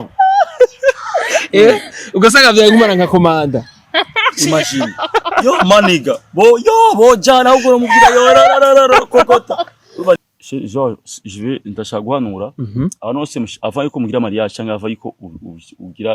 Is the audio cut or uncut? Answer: cut